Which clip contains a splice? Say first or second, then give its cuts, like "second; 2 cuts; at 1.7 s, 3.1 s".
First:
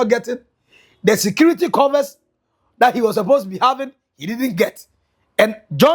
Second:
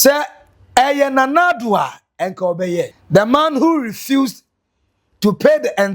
second; 1 cut; at 3.0 s